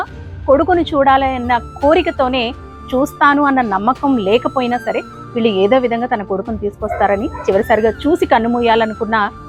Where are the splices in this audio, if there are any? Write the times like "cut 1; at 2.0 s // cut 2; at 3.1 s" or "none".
none